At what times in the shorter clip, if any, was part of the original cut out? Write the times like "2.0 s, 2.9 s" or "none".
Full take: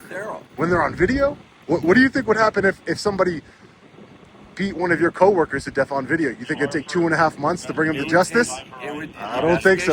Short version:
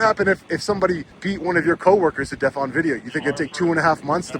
1.1 s